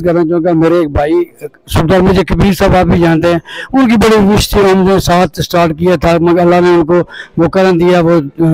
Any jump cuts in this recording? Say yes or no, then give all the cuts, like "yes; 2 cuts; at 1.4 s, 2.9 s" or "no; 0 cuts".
no; 0 cuts